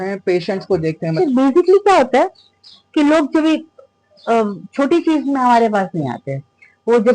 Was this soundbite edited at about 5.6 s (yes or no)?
no